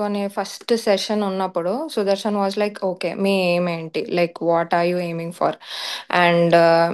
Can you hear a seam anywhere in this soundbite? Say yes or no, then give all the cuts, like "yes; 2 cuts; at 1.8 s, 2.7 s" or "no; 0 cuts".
no; 0 cuts